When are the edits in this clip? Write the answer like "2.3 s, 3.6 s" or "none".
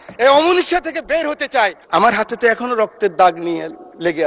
1.8 s